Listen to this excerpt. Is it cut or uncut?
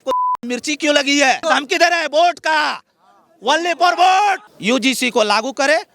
cut